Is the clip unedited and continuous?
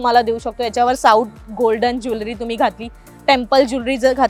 yes; 0 cuts

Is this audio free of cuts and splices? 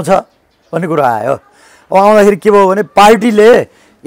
yes; 0 cuts

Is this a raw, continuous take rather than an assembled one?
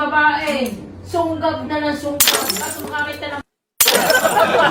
yes; 0 cuts

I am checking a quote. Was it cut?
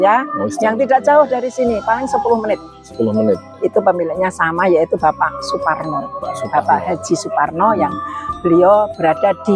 no; 0 cuts

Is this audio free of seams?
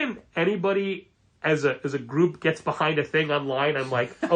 yes; 0 cuts

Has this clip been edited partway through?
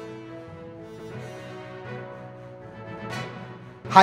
no; 0 cuts

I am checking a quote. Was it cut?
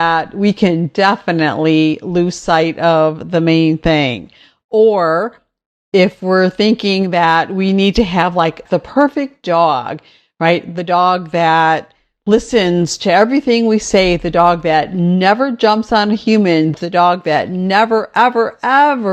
yes; 2 cuts; at 8.6 s, 16.7 s

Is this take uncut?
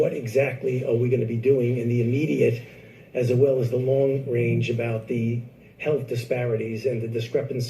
no; 1 cut; at 2.2 s

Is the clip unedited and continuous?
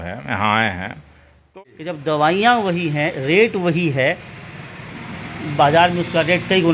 no; 1 cut; at 1.4 s

